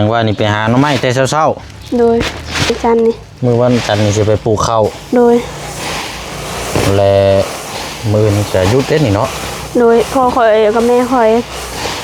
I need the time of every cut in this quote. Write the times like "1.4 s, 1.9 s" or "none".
2.8 s